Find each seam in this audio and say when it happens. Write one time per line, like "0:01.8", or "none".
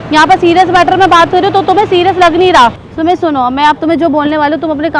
0:02.8

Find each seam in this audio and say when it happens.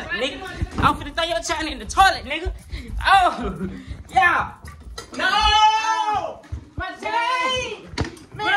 none

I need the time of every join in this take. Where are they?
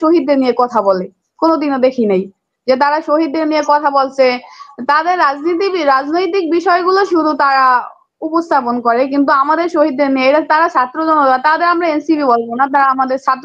none

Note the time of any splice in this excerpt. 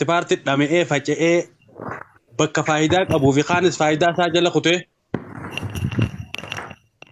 none

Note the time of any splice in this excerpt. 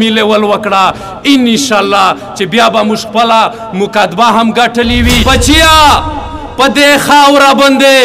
0:05.2

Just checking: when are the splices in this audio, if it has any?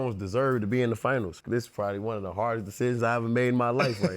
0:01.4

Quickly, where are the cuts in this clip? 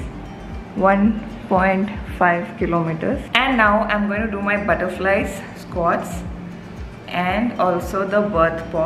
0:03.3

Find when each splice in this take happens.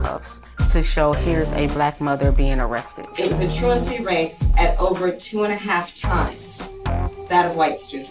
none

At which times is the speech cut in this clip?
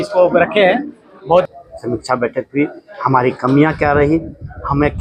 0:01.5

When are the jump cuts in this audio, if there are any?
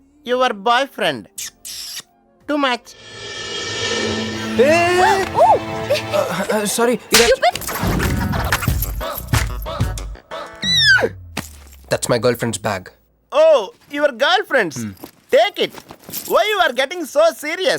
0:07.6

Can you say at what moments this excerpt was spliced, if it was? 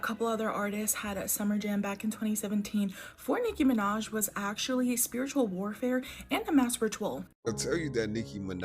0:07.2

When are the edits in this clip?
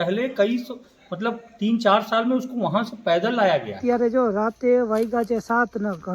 0:03.8

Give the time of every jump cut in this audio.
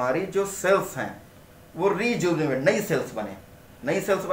none

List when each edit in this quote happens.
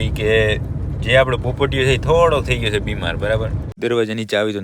0:03.6

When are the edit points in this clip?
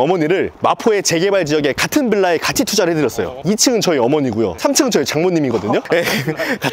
0:03.4
0:04.5
0:05.8

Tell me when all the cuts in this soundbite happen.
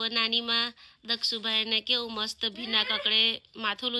none

